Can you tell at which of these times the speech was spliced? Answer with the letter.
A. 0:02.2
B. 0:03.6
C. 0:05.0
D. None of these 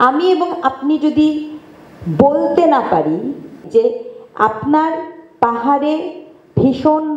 B